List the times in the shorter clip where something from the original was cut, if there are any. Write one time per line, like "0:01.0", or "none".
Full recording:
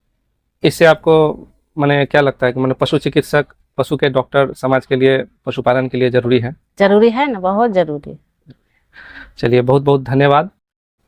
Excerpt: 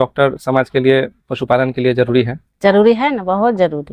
none